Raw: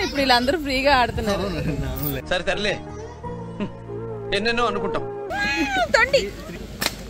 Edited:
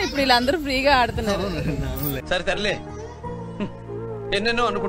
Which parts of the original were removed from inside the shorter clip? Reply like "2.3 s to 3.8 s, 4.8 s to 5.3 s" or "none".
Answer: none